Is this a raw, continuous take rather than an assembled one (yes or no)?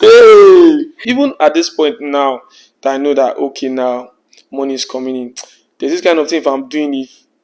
yes